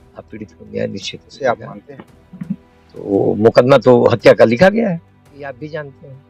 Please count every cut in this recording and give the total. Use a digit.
2